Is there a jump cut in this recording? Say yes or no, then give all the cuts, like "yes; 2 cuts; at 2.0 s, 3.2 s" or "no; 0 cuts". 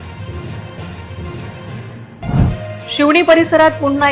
yes; 1 cut; at 1.5 s